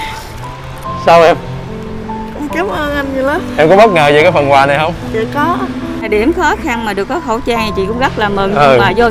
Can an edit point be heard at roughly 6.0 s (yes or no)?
yes